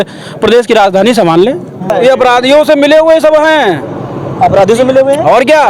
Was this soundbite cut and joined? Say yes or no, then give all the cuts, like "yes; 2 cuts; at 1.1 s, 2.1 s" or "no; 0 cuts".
yes; 1 cut; at 1.9 s